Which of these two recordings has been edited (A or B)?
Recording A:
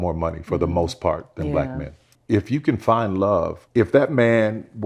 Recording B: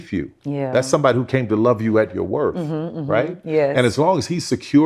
A